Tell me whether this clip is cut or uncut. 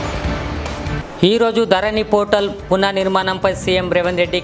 uncut